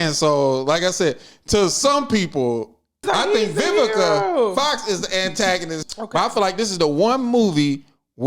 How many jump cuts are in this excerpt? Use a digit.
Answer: 2